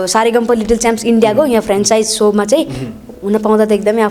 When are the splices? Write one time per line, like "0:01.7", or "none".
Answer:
none